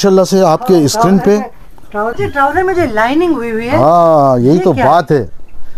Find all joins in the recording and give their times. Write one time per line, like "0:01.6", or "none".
0:02.1